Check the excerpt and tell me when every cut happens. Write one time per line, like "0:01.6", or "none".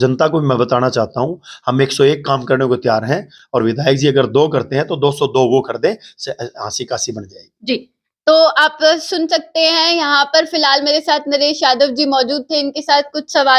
none

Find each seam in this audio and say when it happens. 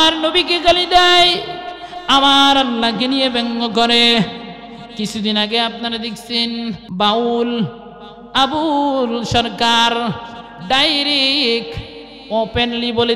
0:06.8

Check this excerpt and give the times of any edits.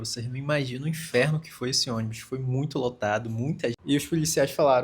0:03.8

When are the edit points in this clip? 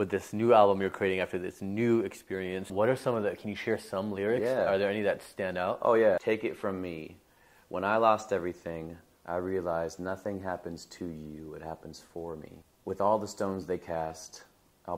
0:02.7
0:06.2
0:12.6

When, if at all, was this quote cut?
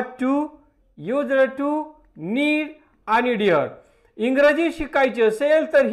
0:03.6

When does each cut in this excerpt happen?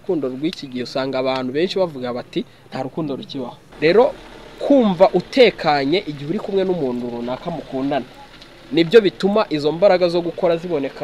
0:03.6

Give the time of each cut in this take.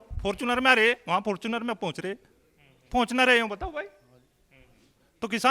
none

